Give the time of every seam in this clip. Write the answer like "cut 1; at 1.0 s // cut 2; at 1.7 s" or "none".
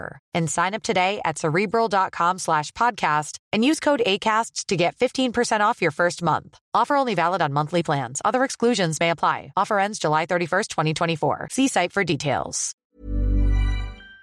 cut 1; at 12.8 s